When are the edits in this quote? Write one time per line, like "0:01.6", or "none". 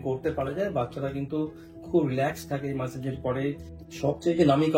0:03.7